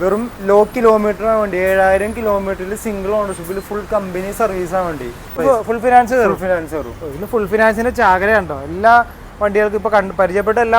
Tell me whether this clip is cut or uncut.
cut